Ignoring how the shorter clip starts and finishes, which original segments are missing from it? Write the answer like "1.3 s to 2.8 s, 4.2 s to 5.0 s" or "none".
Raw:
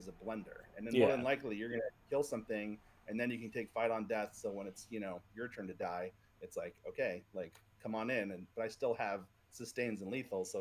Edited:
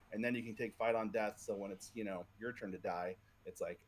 none